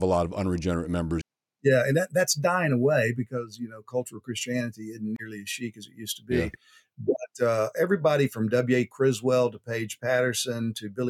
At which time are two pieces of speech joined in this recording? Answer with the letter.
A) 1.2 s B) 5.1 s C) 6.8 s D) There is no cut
A